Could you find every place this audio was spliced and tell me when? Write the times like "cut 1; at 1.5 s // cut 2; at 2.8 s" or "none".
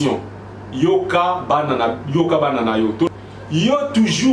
cut 1; at 3.1 s